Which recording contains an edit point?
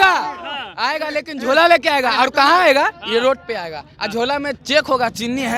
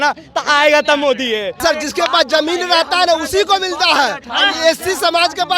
second; 2 cuts; at 1.6 s, 4.3 s

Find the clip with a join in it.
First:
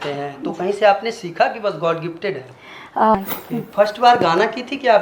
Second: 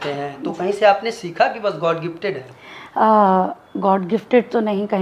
first; 1 cut; at 3.1 s

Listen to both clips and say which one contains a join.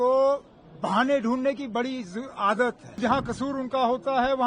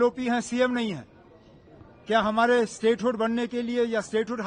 first; 1 cut; at 3.0 s

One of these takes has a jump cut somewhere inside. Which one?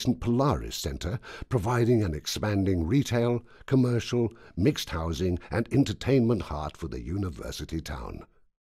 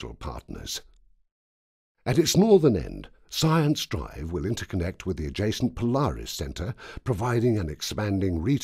first; 1 cut; at 6.9 s

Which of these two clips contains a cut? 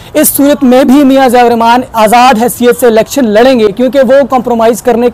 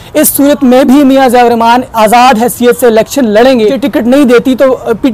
second; 1 cut; at 3.7 s

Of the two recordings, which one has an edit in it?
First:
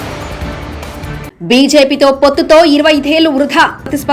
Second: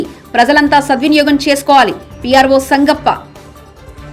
first; 1 cut; at 1.2 s

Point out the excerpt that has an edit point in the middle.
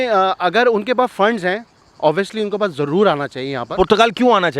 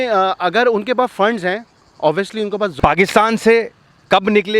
second; 1 cut; at 2.7 s

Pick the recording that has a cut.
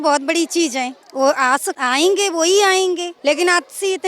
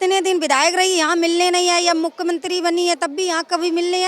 first; 3 cuts; at 1.0 s, 1.7 s, 3.1 s

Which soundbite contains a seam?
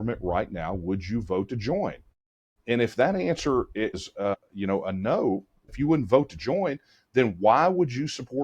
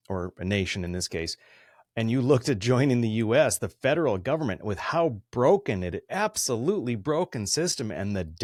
first; 2 cuts; at 4.0 s, 5.7 s

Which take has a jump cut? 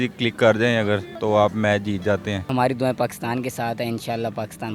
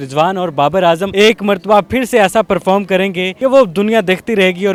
first; 1 cut; at 2.5 s

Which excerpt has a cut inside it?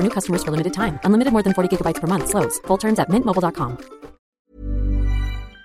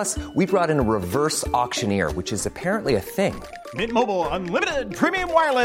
first; 1 cut; at 4.3 s

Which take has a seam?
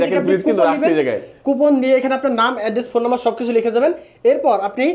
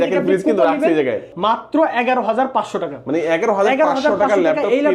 second; 1 cut; at 1.3 s

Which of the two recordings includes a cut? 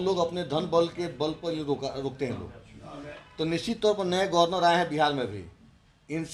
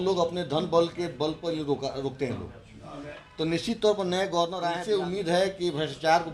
second; 1 cut; at 4.7 s

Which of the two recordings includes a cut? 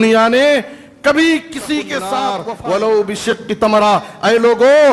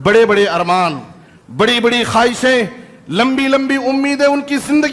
first; 1 cut; at 2.4 s

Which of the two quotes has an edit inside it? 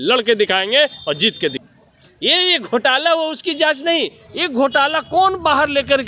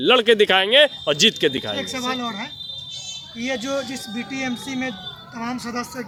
first; 1 cut; at 1.6 s

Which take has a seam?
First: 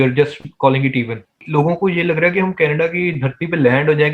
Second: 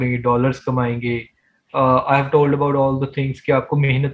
first; 1 cut; at 1.3 s

